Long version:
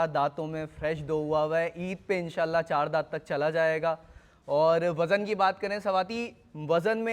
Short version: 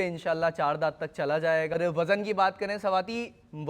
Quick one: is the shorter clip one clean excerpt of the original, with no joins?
no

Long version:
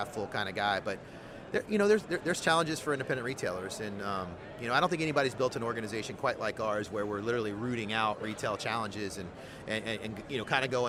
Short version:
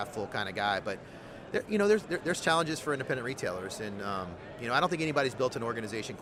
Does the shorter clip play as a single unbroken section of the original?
yes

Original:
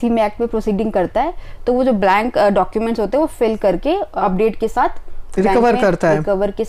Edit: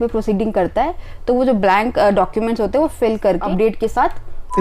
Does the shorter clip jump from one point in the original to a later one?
yes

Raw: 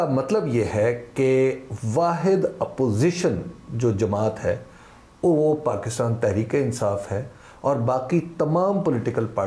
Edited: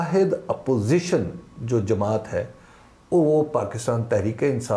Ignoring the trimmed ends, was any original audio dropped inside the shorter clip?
no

